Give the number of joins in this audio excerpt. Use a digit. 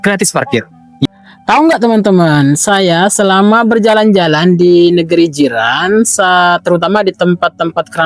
1